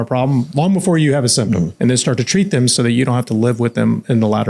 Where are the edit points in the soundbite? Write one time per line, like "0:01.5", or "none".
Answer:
0:01.7